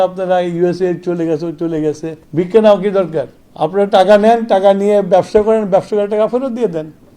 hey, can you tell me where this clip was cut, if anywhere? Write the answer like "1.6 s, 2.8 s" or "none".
2.1 s